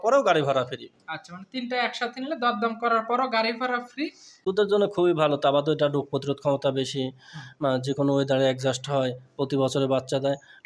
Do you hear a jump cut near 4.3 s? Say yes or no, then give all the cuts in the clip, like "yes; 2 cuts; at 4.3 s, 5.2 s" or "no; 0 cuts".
yes; 1 cut; at 4.3 s